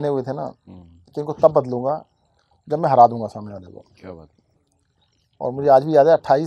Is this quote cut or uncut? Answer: uncut